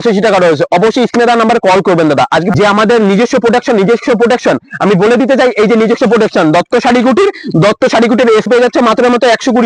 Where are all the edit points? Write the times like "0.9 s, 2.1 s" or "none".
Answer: 2.5 s, 8.5 s

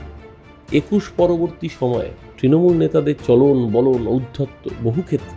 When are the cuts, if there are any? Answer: 2.2 s

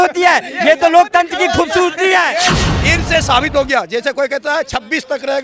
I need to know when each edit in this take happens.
2.7 s

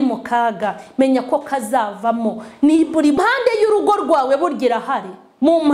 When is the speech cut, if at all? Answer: 3.2 s

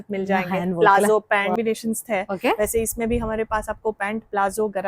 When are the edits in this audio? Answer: 1.6 s

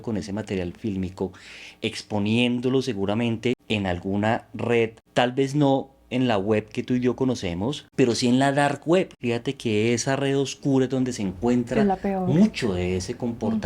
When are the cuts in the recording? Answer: 3.6 s, 5.0 s, 7.8 s, 9.2 s

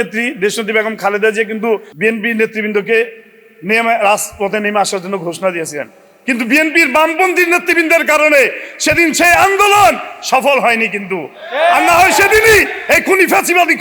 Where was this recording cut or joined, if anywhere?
1.9 s

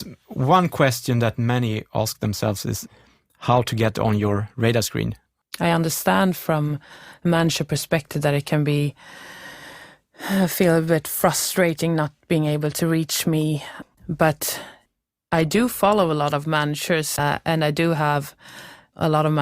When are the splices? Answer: 2.8 s, 5.2 s, 13.7 s, 17.2 s

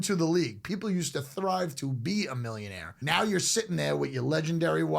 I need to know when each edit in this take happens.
2.9 s

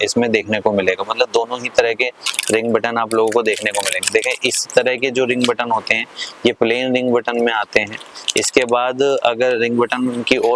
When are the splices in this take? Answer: none

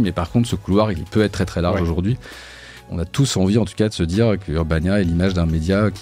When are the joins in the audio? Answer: 1.0 s, 2.7 s, 4.4 s

